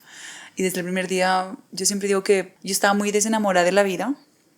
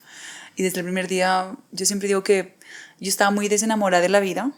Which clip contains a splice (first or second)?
first